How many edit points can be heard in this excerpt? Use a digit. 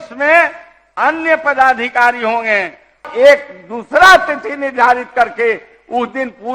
1